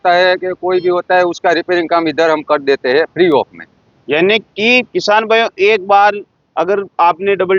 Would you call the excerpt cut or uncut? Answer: uncut